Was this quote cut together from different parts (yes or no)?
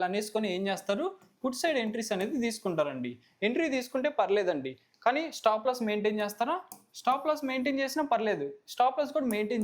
no